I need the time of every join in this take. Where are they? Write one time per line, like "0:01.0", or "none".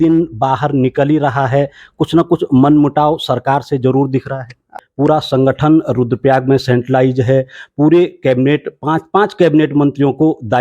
0:04.8